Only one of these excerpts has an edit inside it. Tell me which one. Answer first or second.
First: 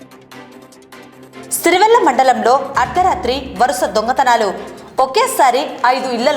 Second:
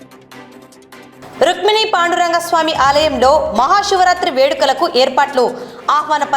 first